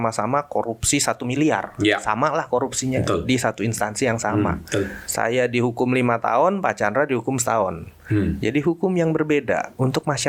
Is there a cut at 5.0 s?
yes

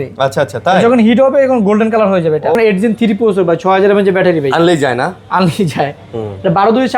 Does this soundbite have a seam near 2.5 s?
yes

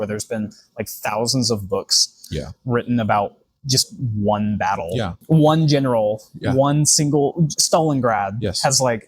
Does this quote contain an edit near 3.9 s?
no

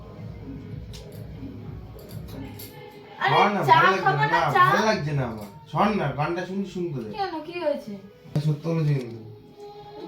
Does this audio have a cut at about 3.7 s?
no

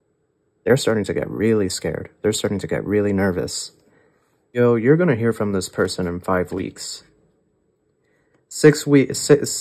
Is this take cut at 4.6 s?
yes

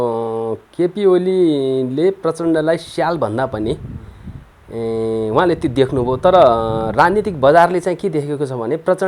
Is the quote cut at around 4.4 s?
no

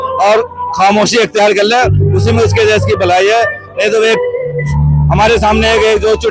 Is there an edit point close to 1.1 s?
no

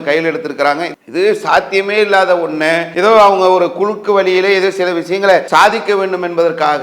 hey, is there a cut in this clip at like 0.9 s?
yes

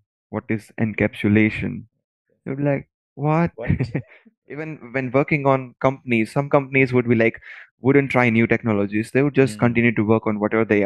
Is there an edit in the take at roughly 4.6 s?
yes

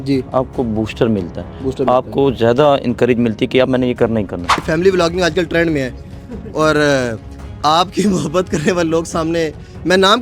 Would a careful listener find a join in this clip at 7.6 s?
no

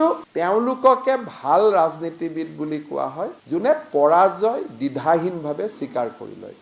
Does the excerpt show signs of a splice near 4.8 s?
no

